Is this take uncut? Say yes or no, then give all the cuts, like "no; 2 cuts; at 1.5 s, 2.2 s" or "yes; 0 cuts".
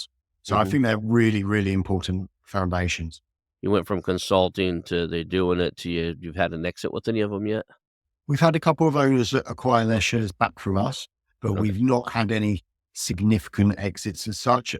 no; 1 cut; at 3.4 s